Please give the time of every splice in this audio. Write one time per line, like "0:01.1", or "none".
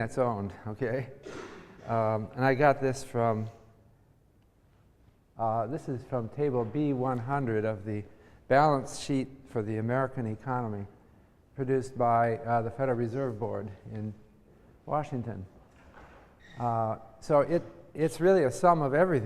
0:09.6